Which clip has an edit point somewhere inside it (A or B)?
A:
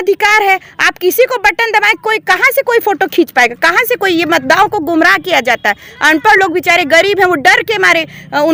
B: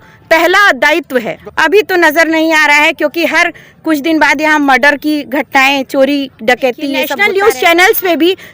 B